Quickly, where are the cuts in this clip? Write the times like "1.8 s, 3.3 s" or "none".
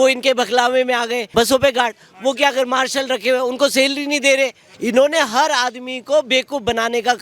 1.2 s, 4.7 s